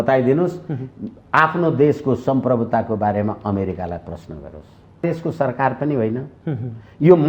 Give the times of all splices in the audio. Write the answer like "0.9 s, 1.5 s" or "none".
5.0 s